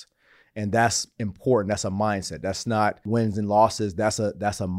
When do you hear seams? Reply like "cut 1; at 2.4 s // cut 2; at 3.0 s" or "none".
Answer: cut 1; at 3.0 s